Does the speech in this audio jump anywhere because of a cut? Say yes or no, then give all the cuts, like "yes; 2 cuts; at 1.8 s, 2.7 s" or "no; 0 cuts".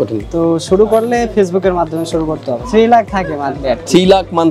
yes; 1 cut; at 2.6 s